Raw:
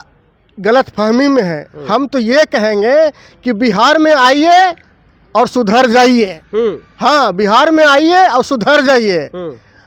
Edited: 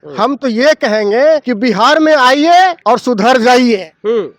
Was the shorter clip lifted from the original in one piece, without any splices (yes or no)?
no